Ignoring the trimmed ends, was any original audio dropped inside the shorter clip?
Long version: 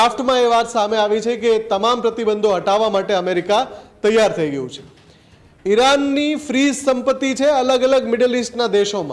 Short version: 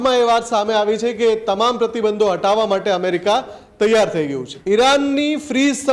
yes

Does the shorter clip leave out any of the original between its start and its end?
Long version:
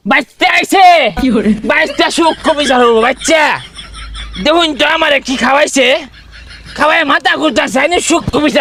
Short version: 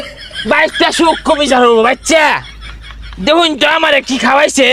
no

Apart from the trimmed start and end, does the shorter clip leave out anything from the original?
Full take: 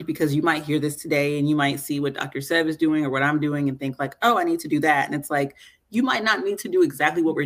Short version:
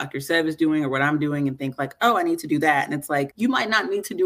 yes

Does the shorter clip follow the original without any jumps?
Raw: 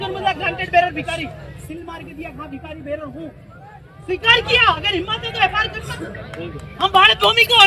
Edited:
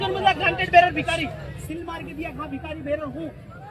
yes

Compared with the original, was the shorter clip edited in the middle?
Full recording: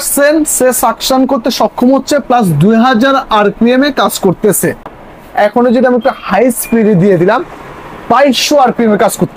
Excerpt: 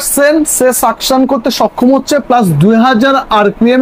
no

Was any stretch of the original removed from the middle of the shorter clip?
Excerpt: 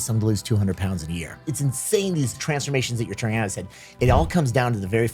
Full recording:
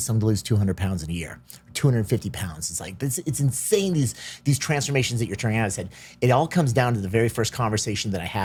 yes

